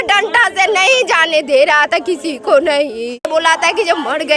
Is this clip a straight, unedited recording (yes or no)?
no